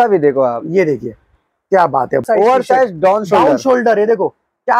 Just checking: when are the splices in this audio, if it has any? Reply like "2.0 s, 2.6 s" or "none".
2.2 s